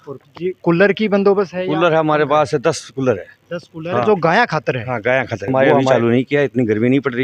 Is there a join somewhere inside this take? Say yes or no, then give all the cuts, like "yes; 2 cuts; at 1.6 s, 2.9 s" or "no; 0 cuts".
yes; 1 cut; at 5.7 s